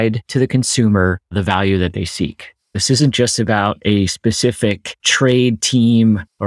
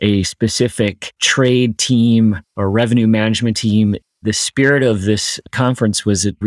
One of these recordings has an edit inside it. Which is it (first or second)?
first